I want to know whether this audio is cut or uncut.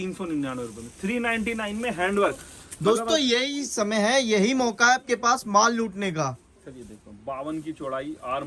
uncut